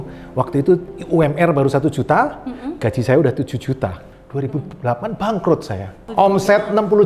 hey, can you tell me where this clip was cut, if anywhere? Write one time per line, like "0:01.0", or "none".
0:04.1
0:06.0